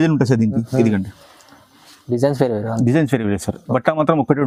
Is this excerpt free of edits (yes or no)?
yes